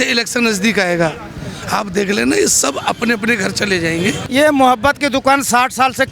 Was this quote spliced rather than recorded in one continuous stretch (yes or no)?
yes